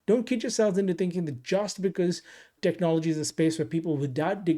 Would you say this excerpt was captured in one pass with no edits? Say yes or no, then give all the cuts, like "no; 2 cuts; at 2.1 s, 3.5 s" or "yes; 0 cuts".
no; 1 cut; at 2.5 s